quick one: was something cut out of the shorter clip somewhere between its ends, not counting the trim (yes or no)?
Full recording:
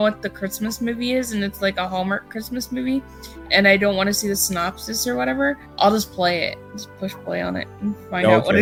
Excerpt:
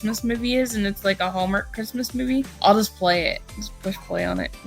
yes